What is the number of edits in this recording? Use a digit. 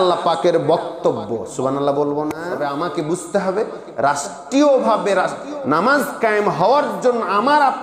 1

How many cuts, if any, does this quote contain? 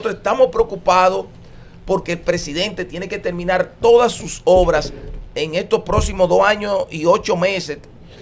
0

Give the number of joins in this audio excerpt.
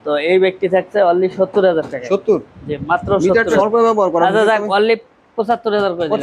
1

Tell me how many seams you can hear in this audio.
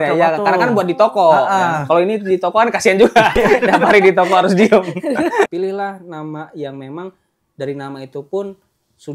1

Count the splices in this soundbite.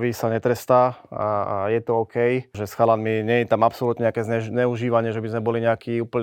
1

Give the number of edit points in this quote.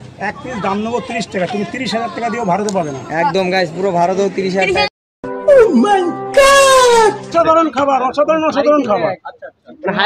0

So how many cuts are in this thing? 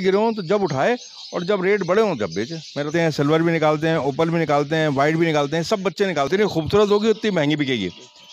2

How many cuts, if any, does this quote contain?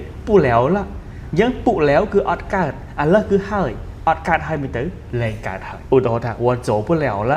1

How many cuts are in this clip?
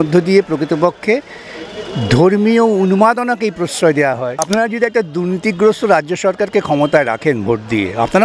1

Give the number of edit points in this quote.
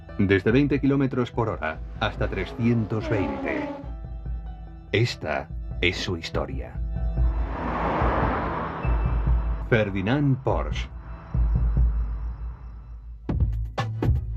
1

